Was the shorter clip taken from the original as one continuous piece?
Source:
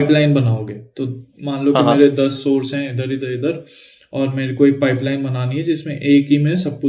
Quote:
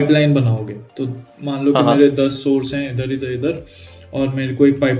yes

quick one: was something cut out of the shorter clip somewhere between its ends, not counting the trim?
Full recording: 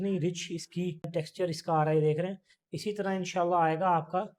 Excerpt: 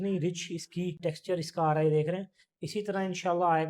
yes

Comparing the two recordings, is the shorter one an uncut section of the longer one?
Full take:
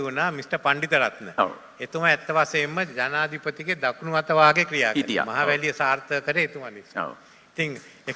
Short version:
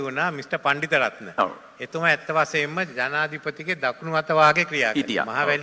yes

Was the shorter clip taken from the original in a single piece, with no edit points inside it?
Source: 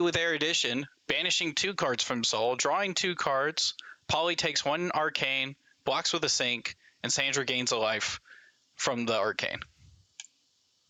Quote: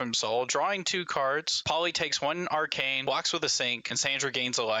no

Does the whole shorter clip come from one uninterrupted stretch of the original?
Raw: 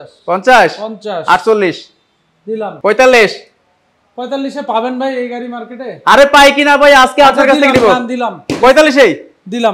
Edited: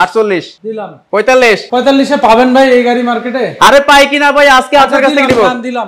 no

